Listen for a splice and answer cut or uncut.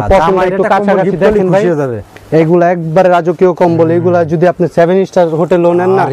uncut